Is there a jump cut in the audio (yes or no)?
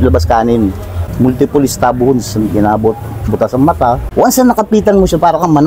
yes